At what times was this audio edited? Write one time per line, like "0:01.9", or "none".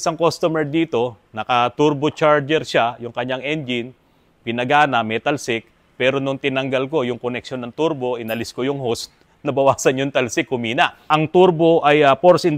0:11.1